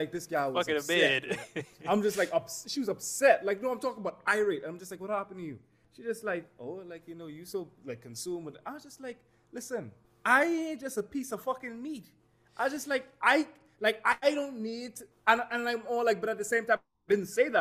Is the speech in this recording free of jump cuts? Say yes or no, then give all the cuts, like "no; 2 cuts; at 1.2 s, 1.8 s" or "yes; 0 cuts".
no; 2 cuts; at 5.8 s, 10.0 s